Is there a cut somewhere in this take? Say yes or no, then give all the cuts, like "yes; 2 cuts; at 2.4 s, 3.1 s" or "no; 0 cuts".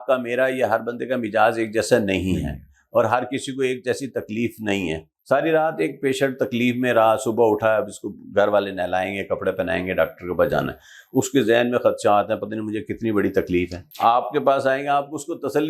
yes; 2 cuts; at 5.1 s, 13.8 s